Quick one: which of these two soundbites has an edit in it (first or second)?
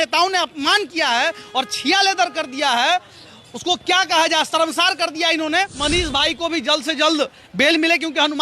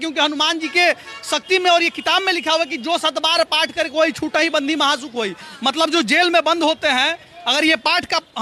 first